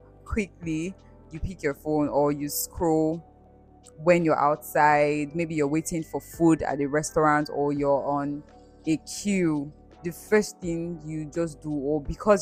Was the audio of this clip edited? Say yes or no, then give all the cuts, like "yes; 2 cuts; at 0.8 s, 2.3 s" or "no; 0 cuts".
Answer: no; 0 cuts